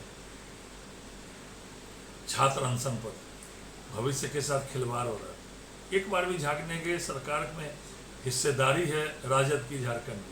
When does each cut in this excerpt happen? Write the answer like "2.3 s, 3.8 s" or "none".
none